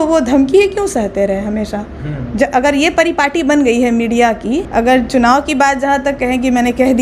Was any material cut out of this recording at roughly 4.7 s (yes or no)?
yes